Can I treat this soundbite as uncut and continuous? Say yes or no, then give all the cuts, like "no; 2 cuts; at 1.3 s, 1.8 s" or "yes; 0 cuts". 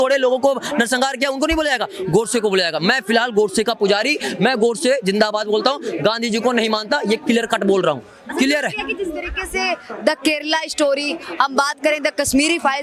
yes; 0 cuts